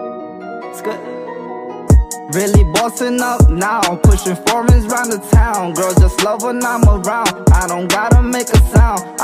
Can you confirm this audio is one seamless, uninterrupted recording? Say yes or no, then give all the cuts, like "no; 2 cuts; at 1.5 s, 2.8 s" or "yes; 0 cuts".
yes; 0 cuts